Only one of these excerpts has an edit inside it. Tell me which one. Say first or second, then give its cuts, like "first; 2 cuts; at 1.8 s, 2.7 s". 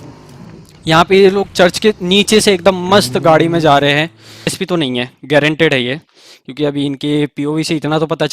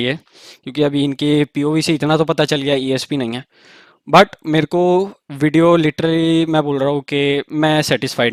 first; 1 cut; at 4.6 s